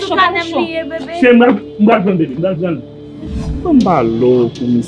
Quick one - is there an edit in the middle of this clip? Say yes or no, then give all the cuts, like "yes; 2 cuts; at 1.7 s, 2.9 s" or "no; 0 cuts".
yes; 1 cut; at 3.6 s